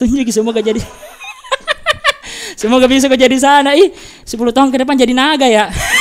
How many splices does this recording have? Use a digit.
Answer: 0